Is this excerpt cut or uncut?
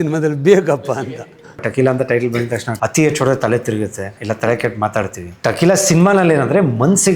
cut